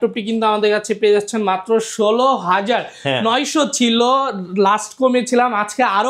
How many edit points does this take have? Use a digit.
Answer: 0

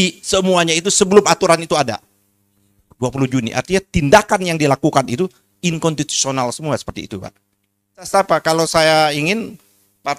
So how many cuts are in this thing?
1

